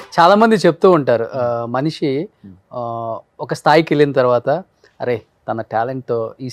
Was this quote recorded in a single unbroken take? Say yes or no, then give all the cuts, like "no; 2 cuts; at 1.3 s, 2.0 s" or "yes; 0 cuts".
yes; 0 cuts